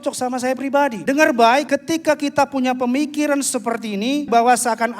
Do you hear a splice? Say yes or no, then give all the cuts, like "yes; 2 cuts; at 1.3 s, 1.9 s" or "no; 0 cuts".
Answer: yes; 3 cuts; at 1.0 s, 1.7 s, 4.3 s